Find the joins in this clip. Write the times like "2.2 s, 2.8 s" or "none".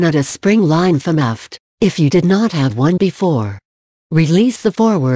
1.0 s